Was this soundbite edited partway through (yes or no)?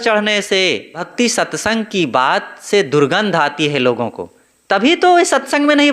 yes